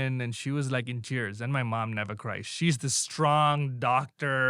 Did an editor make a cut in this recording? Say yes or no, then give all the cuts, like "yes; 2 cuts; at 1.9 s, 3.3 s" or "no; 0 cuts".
no; 0 cuts